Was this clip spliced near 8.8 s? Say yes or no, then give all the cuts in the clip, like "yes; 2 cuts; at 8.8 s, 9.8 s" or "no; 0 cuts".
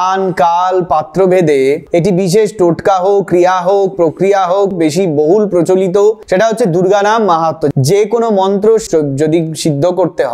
yes; 3 cuts; at 4.7 s, 7.7 s, 8.8 s